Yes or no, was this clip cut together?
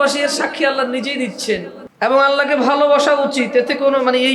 yes